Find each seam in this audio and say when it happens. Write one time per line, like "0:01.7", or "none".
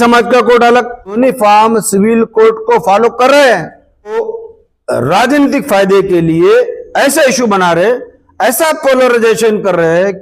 0:01.1
0:04.1